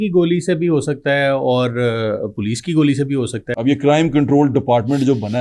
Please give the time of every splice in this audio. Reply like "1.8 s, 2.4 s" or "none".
3.4 s